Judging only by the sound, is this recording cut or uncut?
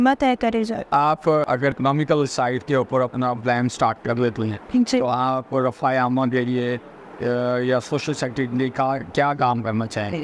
uncut